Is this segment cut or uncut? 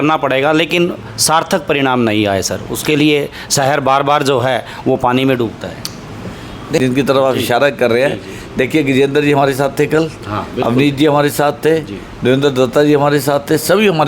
cut